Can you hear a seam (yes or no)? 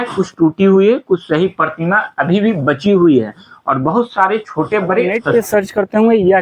yes